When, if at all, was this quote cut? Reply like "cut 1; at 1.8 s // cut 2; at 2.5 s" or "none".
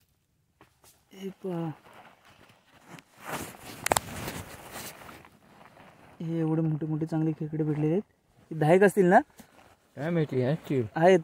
cut 1; at 1.0 s